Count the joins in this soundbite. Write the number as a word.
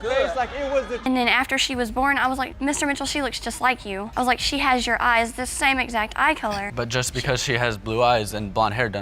one